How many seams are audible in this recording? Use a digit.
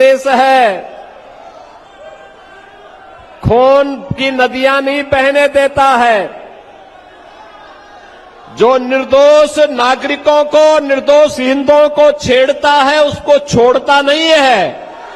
0